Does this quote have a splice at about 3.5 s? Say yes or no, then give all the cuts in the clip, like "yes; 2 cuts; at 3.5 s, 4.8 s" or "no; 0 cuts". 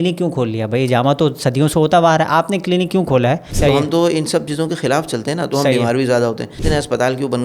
yes; 2 cuts; at 3.5 s, 6.6 s